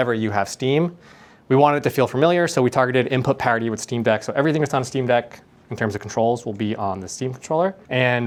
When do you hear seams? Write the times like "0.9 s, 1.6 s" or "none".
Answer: none